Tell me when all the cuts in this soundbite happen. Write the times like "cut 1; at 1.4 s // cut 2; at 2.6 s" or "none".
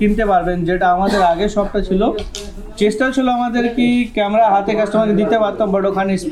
none